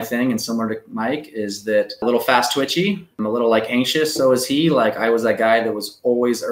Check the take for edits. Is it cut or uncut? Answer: cut